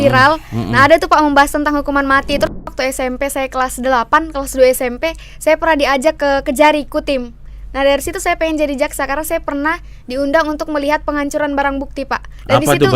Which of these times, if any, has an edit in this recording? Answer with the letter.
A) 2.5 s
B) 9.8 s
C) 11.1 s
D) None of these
A